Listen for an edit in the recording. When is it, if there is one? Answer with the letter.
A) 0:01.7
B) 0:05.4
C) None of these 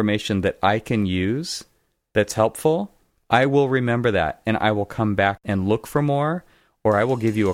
B